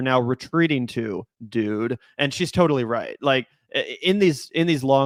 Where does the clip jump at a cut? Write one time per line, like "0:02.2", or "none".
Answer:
none